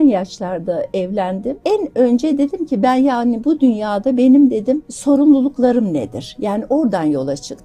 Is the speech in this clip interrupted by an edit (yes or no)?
yes